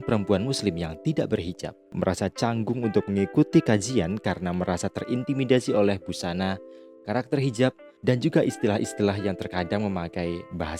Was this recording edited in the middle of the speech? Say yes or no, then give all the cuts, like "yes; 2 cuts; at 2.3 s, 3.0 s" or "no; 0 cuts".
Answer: no; 0 cuts